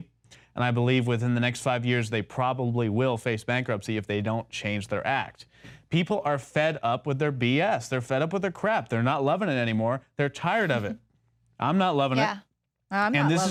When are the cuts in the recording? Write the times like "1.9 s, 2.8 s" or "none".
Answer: none